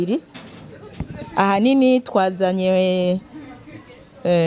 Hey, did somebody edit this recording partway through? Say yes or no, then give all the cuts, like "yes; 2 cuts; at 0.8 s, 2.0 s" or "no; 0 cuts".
no; 0 cuts